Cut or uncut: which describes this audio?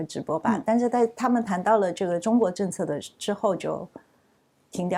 uncut